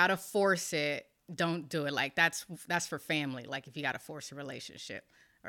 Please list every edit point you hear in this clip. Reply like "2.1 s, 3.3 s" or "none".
1.2 s